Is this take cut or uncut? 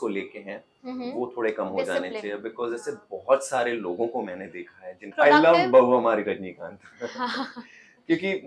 cut